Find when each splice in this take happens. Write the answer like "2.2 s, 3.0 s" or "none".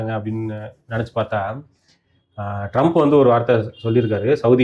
none